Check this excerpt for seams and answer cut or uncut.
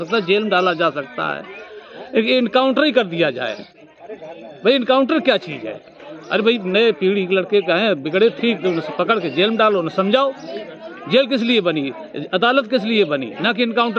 uncut